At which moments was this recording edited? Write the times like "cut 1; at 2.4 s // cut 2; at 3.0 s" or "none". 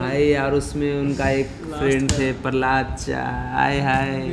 none